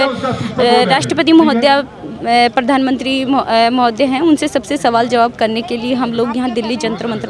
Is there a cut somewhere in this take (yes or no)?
no